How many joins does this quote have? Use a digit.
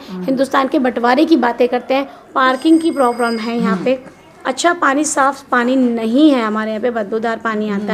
1